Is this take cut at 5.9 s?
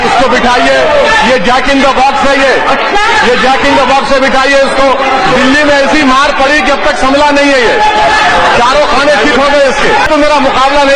no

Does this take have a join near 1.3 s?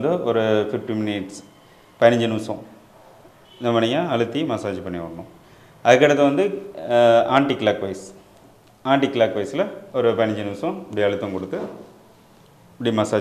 no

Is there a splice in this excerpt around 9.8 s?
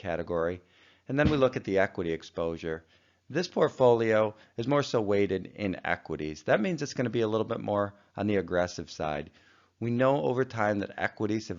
yes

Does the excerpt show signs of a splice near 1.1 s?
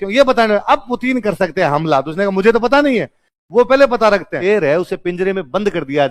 no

